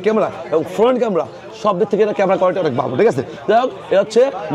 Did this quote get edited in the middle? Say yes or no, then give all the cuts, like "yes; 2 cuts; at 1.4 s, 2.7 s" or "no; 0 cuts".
no; 0 cuts